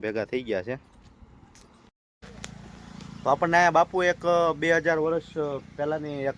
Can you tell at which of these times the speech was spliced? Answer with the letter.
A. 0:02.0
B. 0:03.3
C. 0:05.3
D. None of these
A